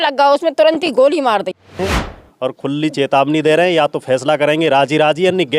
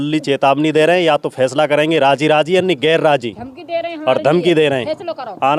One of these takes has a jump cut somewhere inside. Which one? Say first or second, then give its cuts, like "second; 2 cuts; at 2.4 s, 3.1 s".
first; 1 cut; at 1.8 s